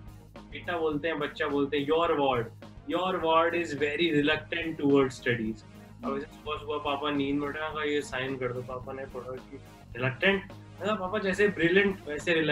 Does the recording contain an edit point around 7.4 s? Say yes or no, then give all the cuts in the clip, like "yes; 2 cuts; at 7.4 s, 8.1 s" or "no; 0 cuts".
no; 0 cuts